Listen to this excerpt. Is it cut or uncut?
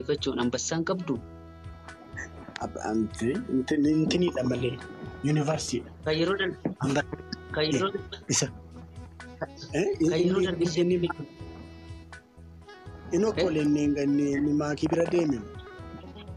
uncut